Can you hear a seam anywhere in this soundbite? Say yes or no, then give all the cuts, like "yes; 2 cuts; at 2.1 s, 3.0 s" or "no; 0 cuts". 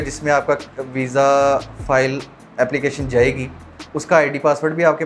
no; 0 cuts